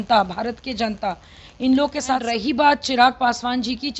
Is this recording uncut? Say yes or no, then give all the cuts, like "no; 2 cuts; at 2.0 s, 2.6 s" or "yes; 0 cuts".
no; 1 cut; at 2.2 s